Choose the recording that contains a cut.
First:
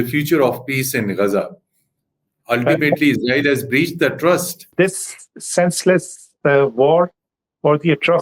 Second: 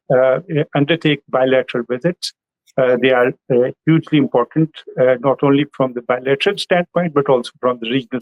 first; 1 cut; at 4.7 s

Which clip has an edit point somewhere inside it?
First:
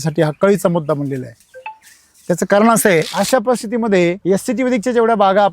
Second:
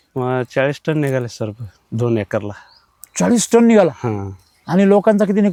first; 2 cuts; at 3.1 s, 4.2 s

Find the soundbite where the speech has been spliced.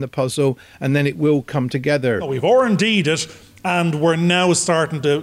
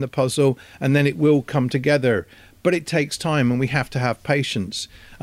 first; 1 cut; at 2.3 s

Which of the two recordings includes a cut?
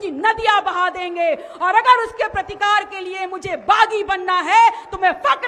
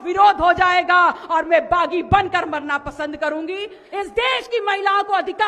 second; 1 cut; at 3.8 s

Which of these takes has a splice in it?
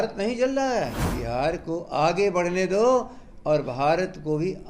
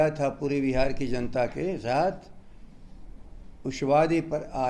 first; 1 cut; at 1.1 s

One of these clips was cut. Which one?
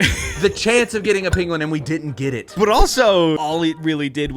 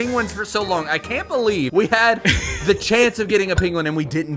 first; 1 cut; at 3.4 s

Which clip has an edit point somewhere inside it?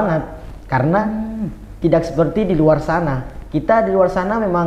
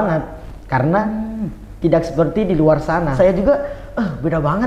second; 1 cut; at 3.1 s

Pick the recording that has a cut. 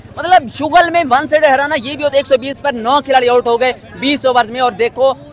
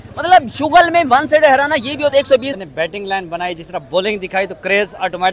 second; 1 cut; at 2.6 s

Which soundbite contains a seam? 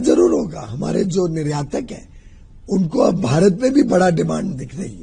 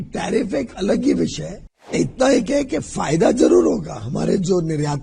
second; 1 cut; at 1.9 s

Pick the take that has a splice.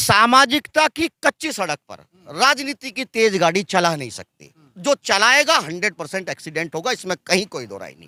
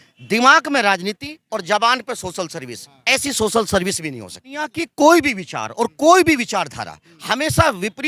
second; 1 cut; at 4.8 s

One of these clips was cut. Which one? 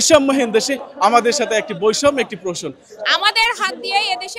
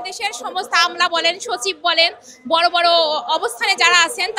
first; 1 cut; at 2.8 s

